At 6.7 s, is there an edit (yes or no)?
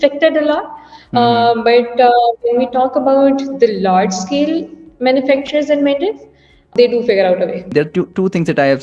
yes